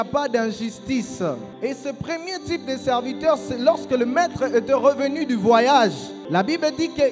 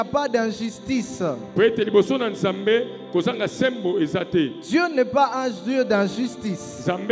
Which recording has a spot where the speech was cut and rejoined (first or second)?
first